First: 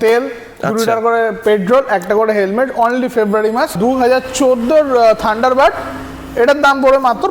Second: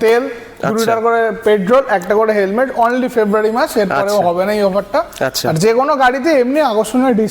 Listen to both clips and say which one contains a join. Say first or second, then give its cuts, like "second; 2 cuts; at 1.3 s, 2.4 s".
first; 1 cut; at 3.7 s